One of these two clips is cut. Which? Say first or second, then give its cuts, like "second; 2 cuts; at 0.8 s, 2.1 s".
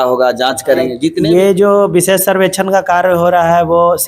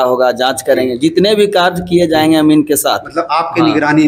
first; 1 cut; at 1.2 s